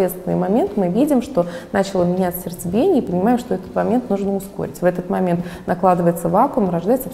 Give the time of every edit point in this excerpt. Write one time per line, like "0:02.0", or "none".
none